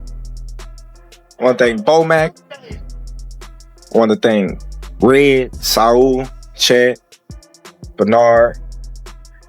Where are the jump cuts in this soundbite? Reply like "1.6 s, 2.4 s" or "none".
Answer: 0.9 s